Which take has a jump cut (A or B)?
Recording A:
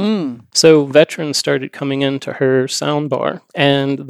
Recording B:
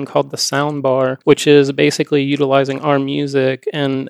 B